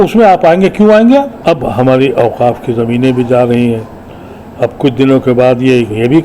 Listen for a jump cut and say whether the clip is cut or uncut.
cut